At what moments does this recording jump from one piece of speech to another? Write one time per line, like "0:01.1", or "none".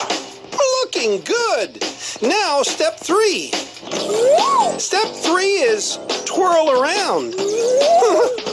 none